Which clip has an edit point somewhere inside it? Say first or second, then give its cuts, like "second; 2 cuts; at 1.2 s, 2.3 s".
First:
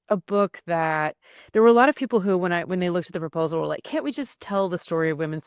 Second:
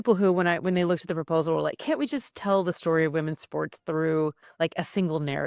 second; 1 cut; at 4.4 s